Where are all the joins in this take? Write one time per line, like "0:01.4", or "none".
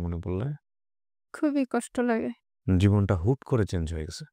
none